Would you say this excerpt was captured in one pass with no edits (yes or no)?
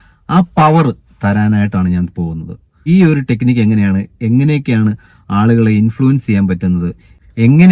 no